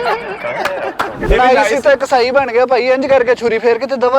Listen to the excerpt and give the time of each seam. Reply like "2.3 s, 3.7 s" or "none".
1.2 s

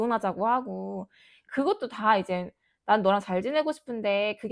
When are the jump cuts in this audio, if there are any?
none

